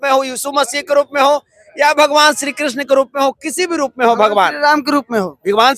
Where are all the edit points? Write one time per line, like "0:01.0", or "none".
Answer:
none